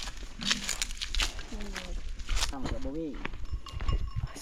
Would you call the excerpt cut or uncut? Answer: cut